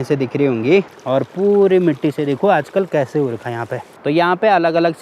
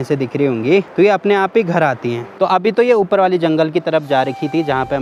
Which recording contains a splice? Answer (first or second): first